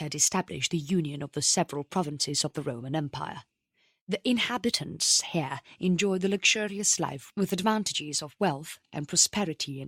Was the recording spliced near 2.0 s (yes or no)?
no